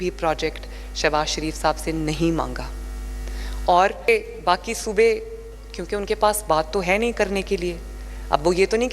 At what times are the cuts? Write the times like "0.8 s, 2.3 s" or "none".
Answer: 4.1 s